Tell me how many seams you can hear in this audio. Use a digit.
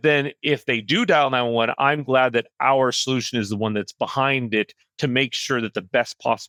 0